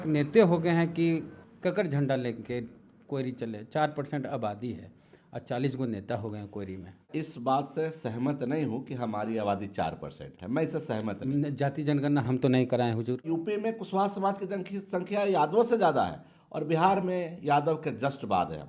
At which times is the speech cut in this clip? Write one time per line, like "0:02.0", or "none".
0:01.4
0:07.1
0:13.2